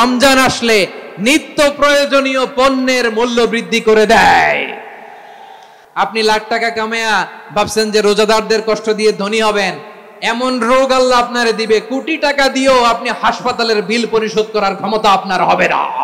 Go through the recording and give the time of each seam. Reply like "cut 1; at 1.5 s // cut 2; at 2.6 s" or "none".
cut 1; at 5.7 s